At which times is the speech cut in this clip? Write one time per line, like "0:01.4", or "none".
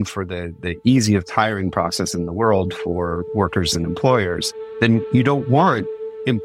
none